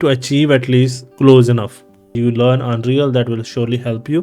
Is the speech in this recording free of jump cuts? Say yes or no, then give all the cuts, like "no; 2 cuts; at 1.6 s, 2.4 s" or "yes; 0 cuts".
no; 2 cuts; at 1.0 s, 2.1 s